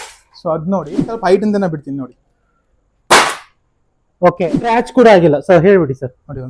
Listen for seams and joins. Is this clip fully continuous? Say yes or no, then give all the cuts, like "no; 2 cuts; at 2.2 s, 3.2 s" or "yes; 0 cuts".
no; 2 cuts; at 1.2 s, 4.6 s